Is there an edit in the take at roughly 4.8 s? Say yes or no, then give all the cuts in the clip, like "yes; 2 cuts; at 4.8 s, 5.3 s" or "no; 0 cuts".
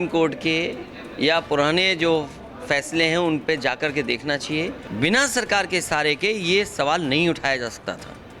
yes; 1 cut; at 4.8 s